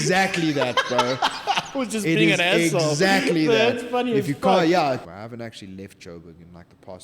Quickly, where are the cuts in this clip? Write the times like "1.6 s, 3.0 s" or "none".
5.1 s